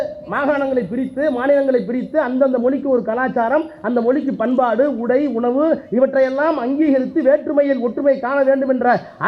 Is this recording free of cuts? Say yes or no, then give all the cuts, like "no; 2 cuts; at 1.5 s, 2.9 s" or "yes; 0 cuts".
yes; 0 cuts